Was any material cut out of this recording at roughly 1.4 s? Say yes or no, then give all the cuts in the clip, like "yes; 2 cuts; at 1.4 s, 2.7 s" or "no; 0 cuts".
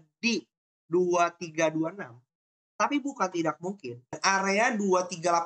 no; 1 cut; at 4.2 s